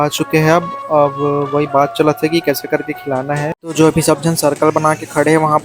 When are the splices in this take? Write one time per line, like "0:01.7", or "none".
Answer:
0:03.6